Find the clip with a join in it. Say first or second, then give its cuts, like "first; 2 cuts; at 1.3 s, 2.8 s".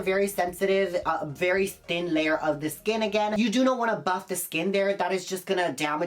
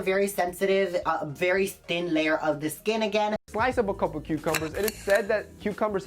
second; 1 cut; at 3.3 s